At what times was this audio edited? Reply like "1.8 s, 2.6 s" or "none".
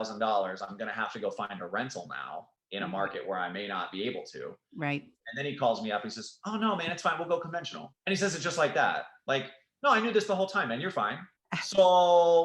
none